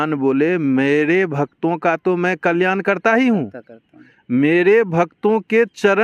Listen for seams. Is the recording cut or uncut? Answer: uncut